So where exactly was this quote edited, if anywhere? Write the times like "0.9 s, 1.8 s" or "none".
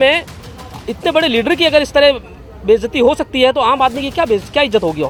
none